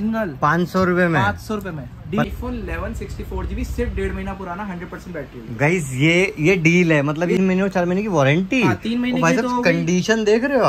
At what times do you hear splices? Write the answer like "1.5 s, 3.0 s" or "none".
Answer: 2.2 s, 7.4 s